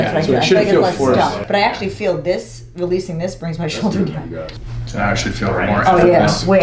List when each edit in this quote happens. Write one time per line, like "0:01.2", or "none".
0:01.4
0:04.5